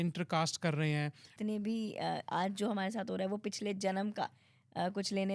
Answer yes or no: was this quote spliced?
yes